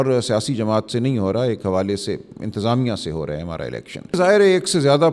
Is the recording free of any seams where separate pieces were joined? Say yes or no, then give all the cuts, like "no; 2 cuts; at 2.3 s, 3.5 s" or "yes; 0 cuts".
no; 1 cut; at 4.1 s